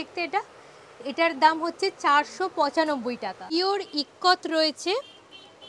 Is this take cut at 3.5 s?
yes; 1 cut; at 3.5 s

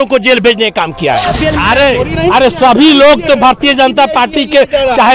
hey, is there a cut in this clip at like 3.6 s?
no; 1 cut; at 1.3 s

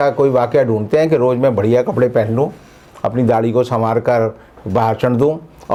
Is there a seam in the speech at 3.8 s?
no; 0 cuts

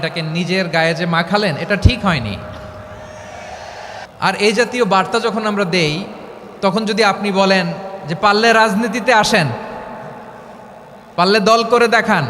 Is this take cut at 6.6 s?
no; 1 cut; at 4.0 s

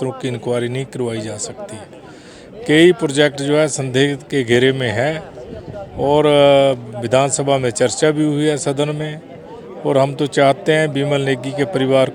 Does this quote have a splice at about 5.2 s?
no; 0 cuts

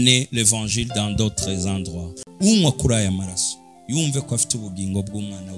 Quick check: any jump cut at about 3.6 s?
no; 1 cut; at 2.2 s

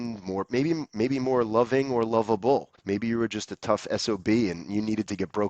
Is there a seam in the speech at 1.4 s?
no; 1 cut; at 2.7 s

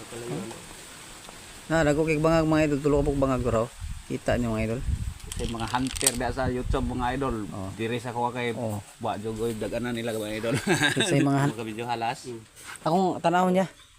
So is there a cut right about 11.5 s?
yes; 1 cut; at 11.5 s

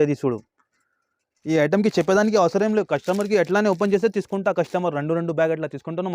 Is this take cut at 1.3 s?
yes; 1 cut; at 1.3 s

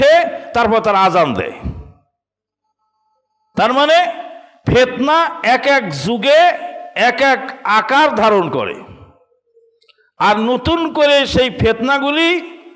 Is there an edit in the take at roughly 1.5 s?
no; 0 cuts

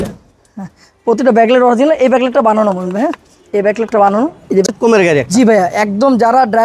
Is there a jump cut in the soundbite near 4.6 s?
yes; 1 cut; at 4.6 s

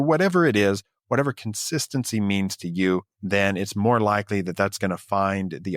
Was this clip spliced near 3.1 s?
yes; 1 cut; at 3.1 s

